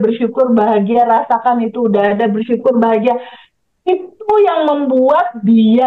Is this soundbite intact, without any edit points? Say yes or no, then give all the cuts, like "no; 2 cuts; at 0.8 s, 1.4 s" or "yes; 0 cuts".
yes; 0 cuts